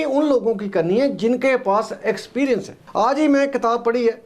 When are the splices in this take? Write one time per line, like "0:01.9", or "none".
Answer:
0:02.8